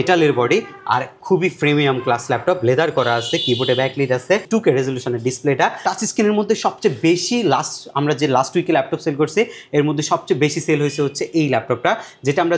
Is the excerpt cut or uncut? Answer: cut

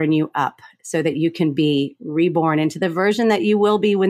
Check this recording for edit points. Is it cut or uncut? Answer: uncut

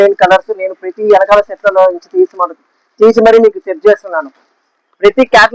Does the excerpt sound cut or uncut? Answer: uncut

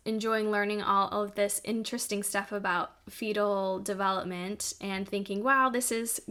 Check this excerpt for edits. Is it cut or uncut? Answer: uncut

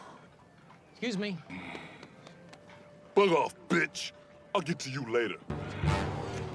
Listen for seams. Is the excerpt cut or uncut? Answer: cut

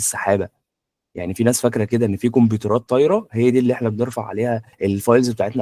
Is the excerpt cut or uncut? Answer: cut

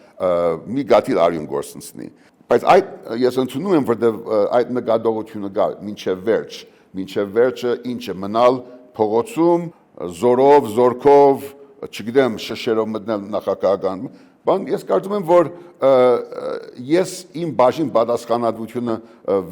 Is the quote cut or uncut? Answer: uncut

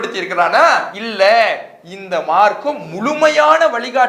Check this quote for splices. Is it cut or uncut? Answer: cut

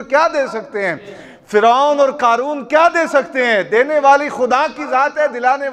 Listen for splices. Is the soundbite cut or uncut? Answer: uncut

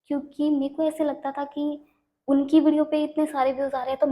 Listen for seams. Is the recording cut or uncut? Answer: uncut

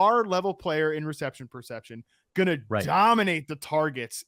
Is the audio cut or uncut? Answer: uncut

